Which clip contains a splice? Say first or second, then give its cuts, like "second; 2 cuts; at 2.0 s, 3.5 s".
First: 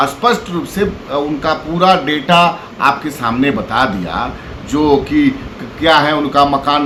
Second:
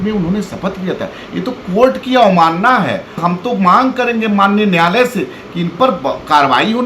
second; 1 cut; at 3.2 s